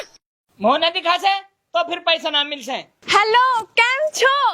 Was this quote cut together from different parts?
yes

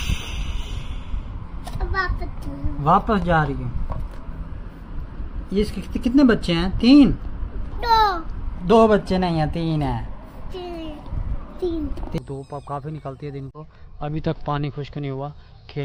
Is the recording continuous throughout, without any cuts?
no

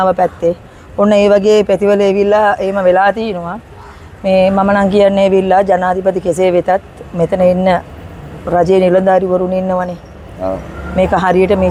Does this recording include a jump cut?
no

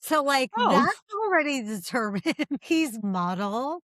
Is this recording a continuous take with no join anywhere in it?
no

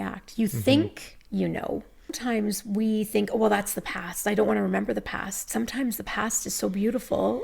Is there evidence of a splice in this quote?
yes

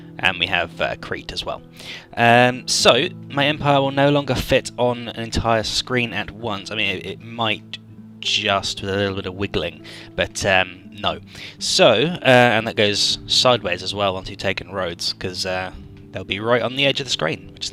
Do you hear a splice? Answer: no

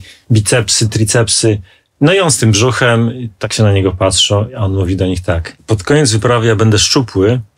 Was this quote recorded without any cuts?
no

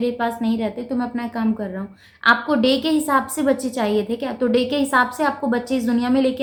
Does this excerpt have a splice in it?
no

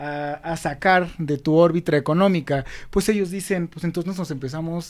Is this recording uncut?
yes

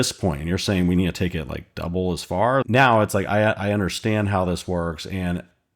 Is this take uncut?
no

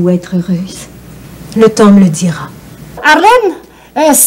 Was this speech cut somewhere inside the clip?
yes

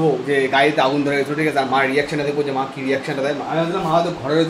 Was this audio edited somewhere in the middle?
no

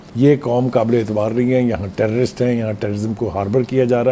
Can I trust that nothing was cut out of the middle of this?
yes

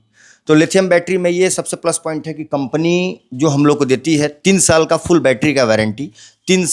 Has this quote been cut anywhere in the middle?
no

